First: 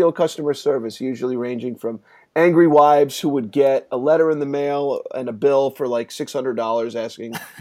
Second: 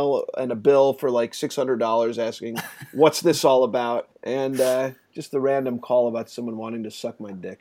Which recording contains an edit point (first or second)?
second